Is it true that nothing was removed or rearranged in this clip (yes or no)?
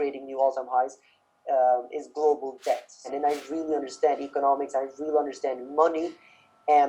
no